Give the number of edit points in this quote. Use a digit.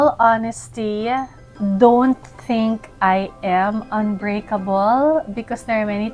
1